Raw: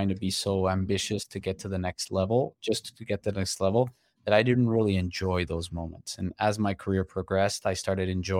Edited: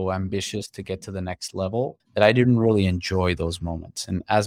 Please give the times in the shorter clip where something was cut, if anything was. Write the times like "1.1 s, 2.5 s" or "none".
2.0 s